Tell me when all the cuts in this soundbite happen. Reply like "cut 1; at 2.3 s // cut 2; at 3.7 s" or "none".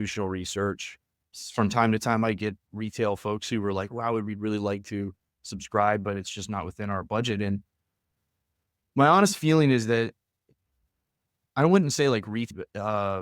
cut 1; at 1.3 s // cut 2; at 12.5 s